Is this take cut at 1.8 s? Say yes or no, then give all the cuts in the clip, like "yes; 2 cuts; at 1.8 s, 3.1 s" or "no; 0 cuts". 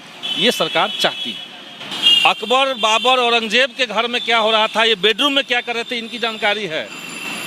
yes; 1 cut; at 1.8 s